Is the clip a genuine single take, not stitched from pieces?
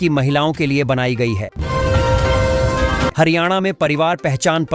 no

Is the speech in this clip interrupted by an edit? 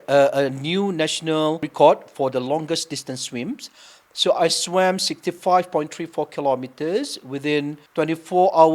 yes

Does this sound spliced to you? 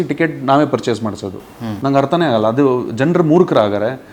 no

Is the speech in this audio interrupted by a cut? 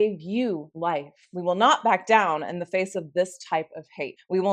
yes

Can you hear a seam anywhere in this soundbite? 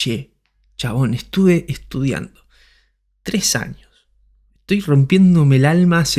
no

